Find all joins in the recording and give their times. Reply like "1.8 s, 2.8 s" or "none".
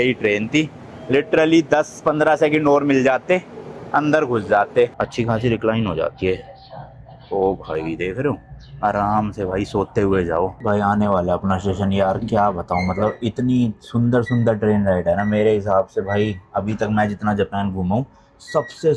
5.0 s, 10.6 s